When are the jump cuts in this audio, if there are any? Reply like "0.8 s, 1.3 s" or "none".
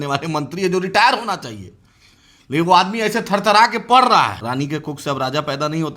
4.4 s